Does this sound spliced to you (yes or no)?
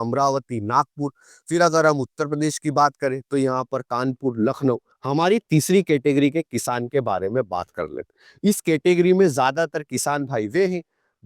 yes